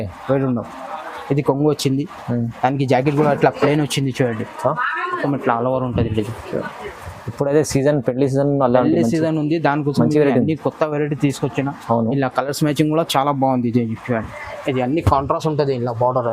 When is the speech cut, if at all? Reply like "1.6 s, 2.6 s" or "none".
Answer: 5.2 s